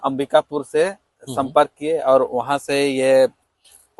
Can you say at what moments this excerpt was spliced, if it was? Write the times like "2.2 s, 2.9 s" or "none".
none